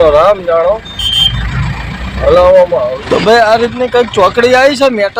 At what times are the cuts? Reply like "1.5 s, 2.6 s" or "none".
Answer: 3.0 s

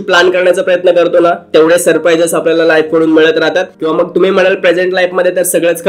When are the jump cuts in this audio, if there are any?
3.7 s

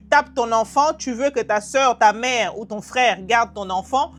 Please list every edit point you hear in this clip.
none

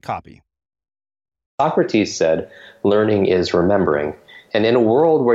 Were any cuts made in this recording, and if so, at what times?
1.5 s

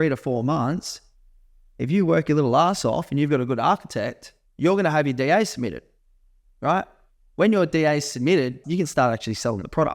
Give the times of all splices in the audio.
8.6 s

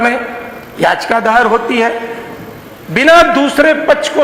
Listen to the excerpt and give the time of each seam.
none

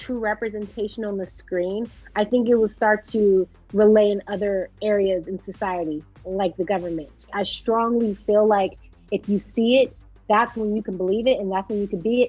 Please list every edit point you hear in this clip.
7.3 s

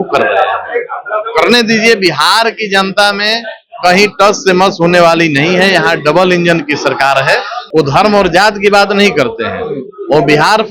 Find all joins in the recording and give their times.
7.6 s

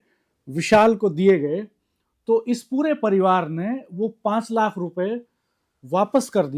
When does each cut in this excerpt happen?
none

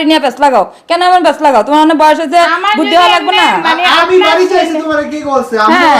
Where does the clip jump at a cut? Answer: none

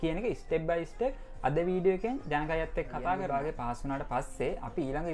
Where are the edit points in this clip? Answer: 3.2 s

